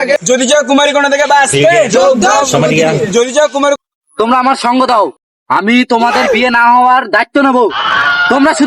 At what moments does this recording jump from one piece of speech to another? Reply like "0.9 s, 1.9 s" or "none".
3.8 s